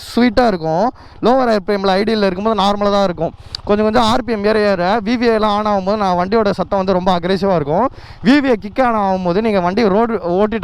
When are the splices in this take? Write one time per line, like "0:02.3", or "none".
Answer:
none